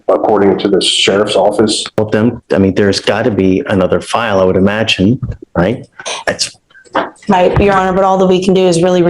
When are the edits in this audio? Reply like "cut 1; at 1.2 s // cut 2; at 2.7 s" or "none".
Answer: cut 1; at 1.8 s